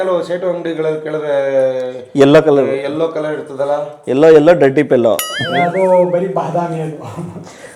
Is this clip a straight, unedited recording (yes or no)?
yes